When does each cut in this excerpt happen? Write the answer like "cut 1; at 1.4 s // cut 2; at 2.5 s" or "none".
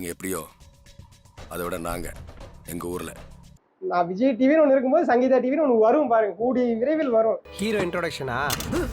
cut 1; at 3.5 s